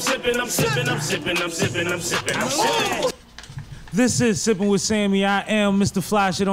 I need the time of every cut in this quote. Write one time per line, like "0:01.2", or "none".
0:03.3